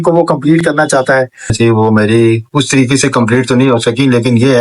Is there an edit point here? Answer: yes; 1 cut; at 1.5 s

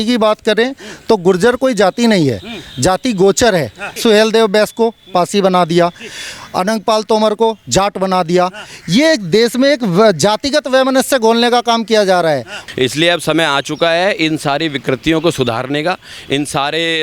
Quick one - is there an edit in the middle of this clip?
yes; 2 cuts; at 3.9 s, 12.6 s

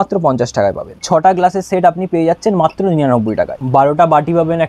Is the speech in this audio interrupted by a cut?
yes; 2 cuts; at 1.0 s, 3.5 s

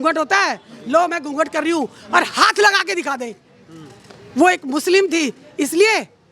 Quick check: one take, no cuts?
yes; 0 cuts

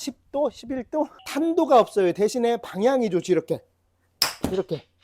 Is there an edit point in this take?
yes; 1 cut; at 1.2 s

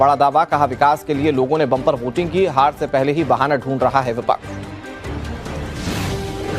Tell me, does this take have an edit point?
yes; 1 cut; at 2.2 s

